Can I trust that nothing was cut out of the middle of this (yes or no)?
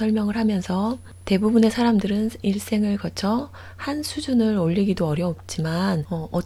yes